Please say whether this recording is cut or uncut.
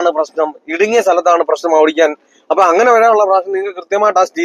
uncut